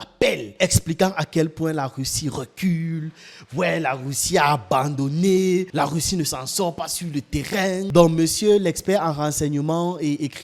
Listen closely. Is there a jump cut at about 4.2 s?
no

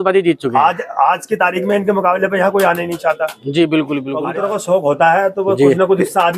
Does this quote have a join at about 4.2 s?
yes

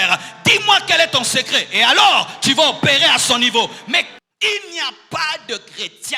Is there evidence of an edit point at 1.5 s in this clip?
no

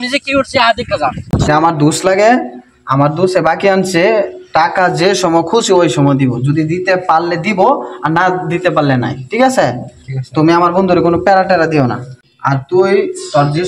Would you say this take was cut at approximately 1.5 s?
yes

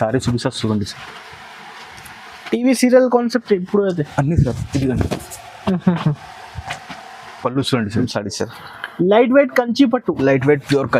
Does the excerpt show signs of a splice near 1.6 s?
no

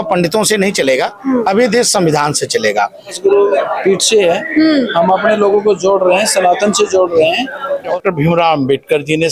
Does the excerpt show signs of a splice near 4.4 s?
no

